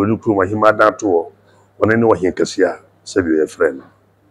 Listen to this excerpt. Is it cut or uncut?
uncut